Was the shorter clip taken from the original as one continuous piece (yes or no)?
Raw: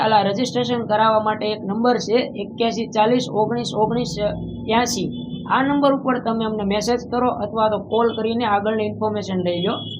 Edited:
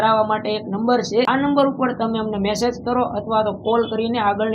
no